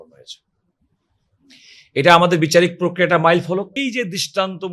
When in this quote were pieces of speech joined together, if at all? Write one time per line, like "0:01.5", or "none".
0:03.8